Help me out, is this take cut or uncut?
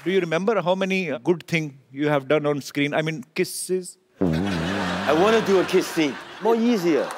cut